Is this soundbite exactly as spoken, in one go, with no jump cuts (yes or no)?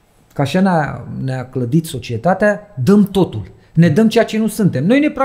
yes